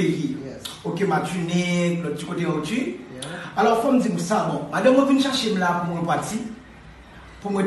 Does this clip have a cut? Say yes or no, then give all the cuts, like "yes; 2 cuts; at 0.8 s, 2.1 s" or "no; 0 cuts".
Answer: no; 0 cuts